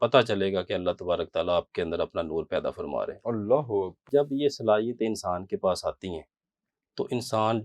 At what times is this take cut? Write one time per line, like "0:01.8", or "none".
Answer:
0:04.1